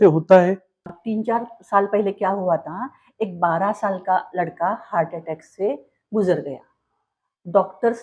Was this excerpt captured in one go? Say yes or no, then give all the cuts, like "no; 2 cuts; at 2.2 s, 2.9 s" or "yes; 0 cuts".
no; 1 cut; at 0.9 s